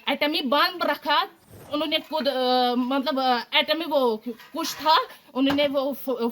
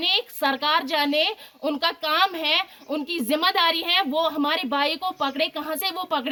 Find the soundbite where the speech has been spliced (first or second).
first